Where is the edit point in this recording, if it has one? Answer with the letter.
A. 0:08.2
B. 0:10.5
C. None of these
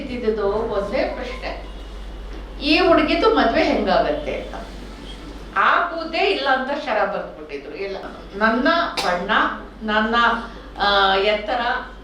A